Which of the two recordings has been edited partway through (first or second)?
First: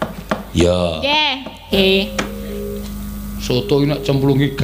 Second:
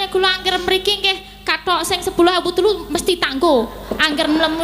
first